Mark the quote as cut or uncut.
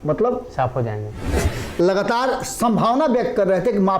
cut